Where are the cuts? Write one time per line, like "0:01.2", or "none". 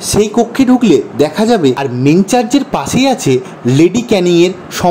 0:01.9